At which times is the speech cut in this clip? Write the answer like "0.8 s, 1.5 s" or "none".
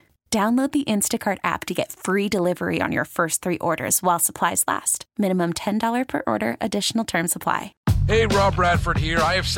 7.7 s